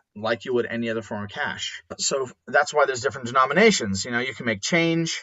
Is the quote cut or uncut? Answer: cut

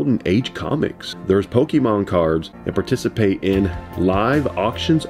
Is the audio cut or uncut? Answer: cut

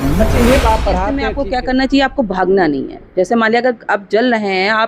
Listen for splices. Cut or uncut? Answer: cut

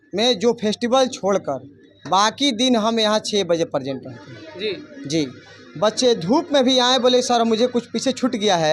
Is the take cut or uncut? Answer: uncut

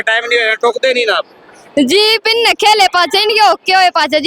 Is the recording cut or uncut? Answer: uncut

